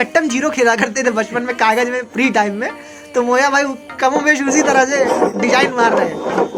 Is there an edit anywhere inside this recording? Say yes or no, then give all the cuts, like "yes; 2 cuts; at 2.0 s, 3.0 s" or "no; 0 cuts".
no; 0 cuts